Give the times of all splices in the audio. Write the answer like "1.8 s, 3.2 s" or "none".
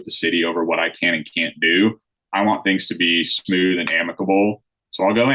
none